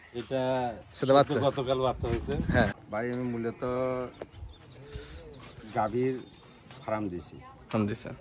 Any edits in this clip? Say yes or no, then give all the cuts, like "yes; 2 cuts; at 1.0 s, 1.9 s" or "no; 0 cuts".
yes; 1 cut; at 2.8 s